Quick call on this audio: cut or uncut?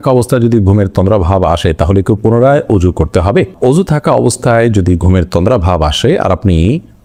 uncut